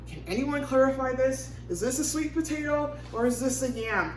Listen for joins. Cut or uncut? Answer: uncut